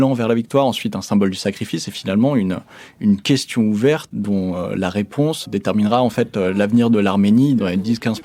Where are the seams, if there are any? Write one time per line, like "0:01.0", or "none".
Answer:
none